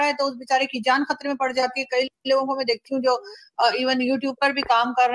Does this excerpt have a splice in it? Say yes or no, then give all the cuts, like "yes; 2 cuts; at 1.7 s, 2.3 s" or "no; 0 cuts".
yes; 1 cut; at 2.2 s